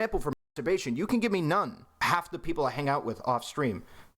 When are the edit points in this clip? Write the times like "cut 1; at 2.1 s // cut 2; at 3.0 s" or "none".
cut 1; at 1.9 s